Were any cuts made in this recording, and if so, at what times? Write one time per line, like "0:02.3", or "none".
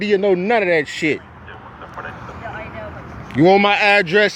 none